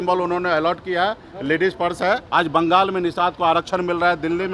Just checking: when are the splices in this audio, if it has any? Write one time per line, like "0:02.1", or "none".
0:02.2